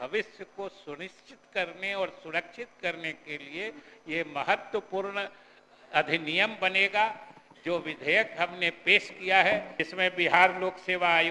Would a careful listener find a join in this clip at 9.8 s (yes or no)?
yes